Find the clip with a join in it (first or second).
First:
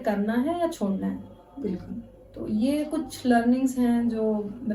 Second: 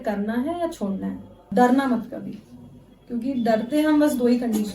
second